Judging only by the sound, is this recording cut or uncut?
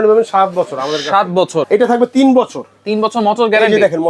cut